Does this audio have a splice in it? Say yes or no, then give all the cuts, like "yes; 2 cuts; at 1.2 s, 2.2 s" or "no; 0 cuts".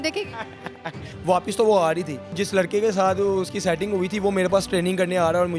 yes; 2 cuts; at 1.1 s, 2.4 s